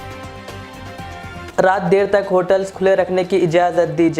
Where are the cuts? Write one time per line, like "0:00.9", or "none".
0:01.5